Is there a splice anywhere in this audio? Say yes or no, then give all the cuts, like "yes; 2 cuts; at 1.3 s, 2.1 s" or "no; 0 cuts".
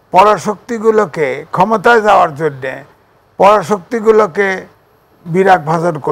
no; 0 cuts